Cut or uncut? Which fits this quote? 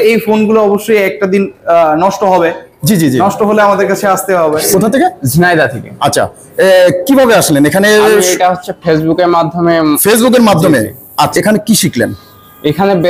cut